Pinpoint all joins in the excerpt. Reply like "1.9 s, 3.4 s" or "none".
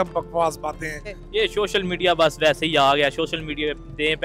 1.2 s